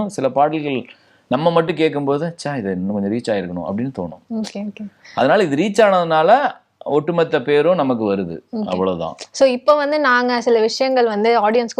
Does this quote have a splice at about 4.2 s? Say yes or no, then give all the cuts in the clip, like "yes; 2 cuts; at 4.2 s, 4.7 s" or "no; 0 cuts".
no; 0 cuts